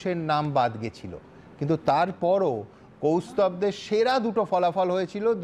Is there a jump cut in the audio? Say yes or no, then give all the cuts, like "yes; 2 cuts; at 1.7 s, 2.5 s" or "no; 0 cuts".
no; 0 cuts